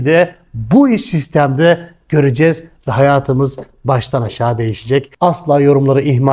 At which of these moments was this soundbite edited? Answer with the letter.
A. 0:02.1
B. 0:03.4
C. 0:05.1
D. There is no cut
C